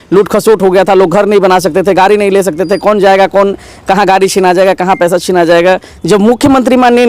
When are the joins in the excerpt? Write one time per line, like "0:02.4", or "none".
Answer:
0:05.9